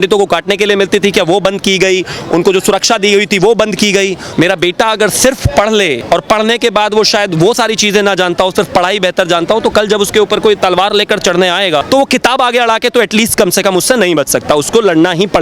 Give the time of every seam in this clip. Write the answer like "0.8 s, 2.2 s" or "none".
4.2 s, 6.0 s, 11.8 s